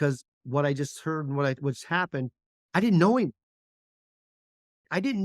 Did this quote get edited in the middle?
no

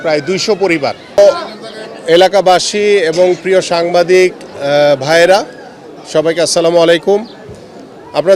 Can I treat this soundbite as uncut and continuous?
no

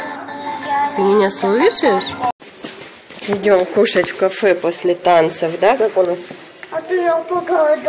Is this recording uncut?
no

